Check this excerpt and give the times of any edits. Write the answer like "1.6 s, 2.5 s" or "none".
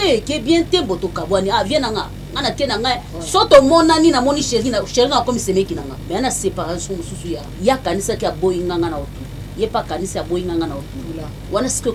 5.9 s, 7.5 s